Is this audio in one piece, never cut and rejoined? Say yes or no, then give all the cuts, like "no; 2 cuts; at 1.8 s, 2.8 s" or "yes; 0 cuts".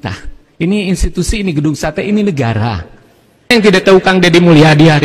no; 1 cut; at 3.5 s